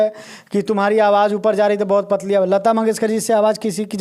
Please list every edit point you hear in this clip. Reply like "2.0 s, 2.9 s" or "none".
none